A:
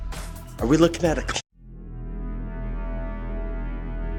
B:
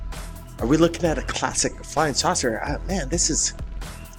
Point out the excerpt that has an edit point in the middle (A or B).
B